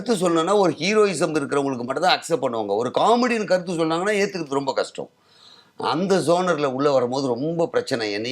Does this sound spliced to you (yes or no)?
no